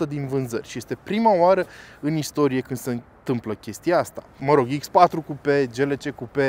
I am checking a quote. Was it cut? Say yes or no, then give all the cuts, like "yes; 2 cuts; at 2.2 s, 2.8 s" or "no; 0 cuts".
yes; 1 cut; at 4.3 s